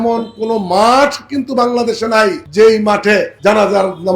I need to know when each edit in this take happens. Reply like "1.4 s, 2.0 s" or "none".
2.4 s, 3.3 s